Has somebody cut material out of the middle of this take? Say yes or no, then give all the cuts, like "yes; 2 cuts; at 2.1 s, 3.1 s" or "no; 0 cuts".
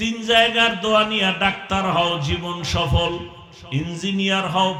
no; 0 cuts